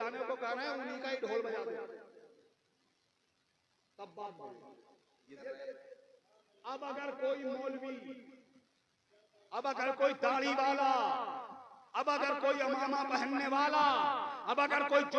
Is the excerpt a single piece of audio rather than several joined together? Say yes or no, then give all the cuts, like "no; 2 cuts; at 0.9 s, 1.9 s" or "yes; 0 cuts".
no; 1 cut; at 5.4 s